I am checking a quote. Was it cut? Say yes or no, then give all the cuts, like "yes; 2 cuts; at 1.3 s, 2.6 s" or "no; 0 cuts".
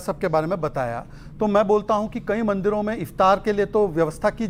no; 0 cuts